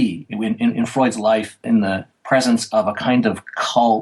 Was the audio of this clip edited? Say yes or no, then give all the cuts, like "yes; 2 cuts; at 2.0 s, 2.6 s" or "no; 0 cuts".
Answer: yes; 1 cut; at 1.8 s